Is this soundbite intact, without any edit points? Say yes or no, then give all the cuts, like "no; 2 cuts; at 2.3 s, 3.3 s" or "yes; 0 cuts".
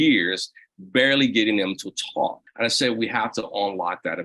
no; 1 cut; at 2.4 s